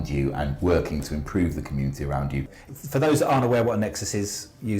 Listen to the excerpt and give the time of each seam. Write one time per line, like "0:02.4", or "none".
0:02.6